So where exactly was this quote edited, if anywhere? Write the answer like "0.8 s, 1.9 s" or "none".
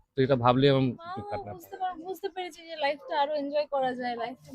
1.4 s